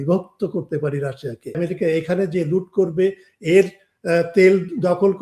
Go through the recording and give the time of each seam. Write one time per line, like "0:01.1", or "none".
0:01.6